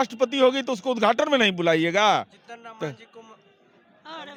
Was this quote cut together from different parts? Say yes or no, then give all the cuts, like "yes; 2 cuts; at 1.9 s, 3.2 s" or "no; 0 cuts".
no; 0 cuts